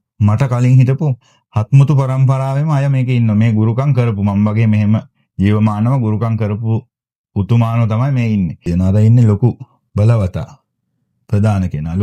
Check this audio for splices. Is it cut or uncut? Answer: cut